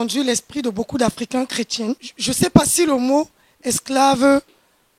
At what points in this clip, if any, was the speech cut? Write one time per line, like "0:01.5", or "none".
0:02.1

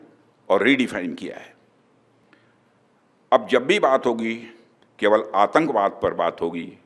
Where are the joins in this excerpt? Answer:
0:02.2

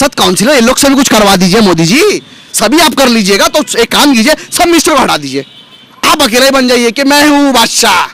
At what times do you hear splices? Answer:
none

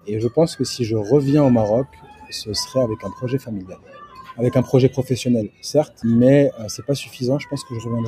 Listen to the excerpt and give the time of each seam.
0:05.9

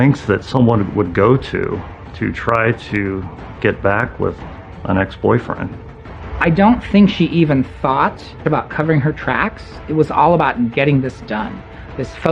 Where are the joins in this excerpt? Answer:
0:06.0
0:08.4

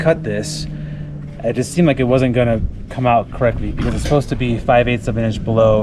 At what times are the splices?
none

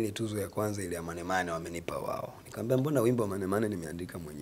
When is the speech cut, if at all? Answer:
none

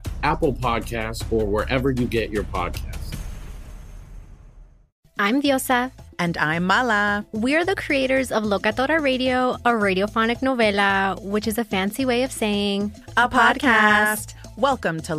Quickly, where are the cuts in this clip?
0:05.1

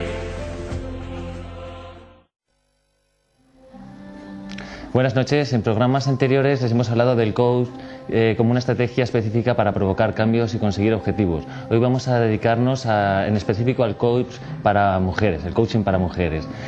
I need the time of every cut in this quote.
none

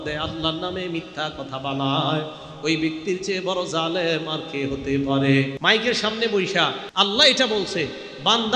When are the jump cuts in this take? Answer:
0:05.5
0:06.8

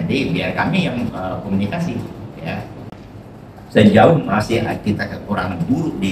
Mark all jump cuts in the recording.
0:02.9

